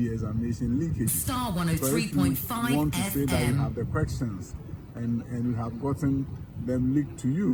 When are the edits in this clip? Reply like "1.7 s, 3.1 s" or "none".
none